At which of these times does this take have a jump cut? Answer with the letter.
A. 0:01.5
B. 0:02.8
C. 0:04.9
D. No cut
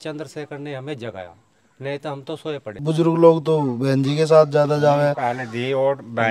B